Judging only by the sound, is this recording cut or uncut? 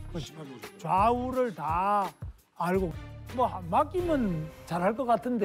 cut